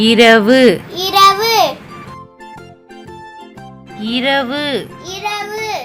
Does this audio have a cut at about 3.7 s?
yes; 2 cuts; at 1.8 s, 3.7 s

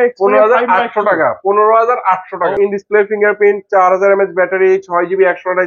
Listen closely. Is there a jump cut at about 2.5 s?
yes; 1 cut; at 2.5 s

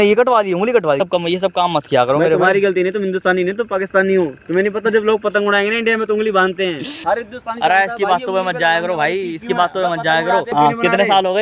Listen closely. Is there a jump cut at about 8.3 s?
no; 3 cuts; at 1.0 s, 6.9 s, 10.5 s

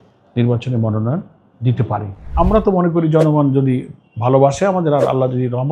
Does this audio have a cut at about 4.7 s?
no; 1 cut; at 2.2 s

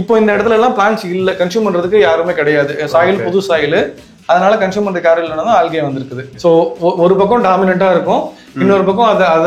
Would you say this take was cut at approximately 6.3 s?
yes; 1 cut; at 6.3 s

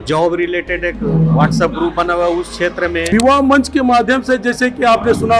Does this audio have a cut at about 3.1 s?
yes; 1 cut; at 3.1 s

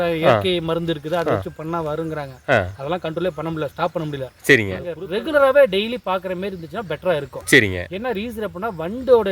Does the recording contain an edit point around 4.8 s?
yes; 1 cut; at 4.8 s

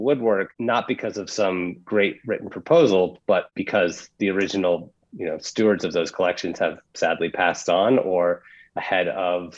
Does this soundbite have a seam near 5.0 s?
no; 1 cut; at 6.9 s

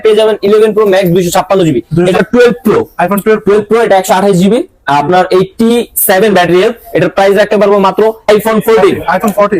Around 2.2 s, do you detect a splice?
yes; 2 cuts; at 2.2 s, 8.3 s

